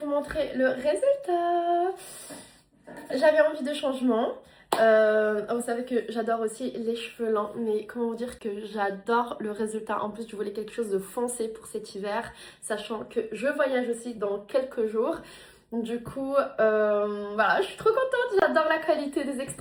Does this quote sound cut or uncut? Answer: uncut